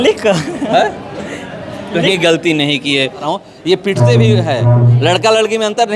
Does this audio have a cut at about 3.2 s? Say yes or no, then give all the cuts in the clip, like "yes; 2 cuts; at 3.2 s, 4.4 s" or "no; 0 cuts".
yes; 1 cut; at 3.2 s